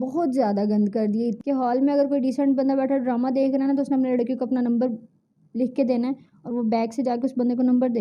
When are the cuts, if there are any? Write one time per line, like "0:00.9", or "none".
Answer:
0:01.4